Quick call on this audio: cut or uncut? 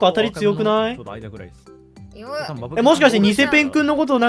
uncut